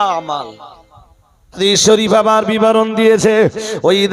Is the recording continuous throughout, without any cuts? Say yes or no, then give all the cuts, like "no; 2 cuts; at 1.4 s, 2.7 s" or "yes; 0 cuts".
no; 1 cut; at 1.6 s